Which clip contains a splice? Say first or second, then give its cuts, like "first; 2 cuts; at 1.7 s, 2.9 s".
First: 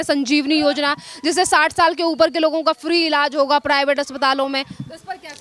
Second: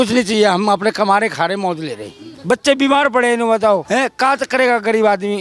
second; 2 cuts; at 2.3 s, 3.8 s